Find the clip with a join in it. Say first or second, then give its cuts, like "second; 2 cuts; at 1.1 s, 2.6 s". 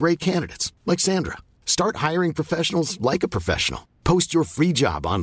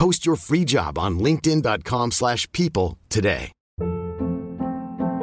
second; 1 cut; at 3.6 s